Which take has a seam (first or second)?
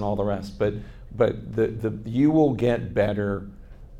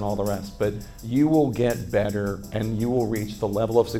second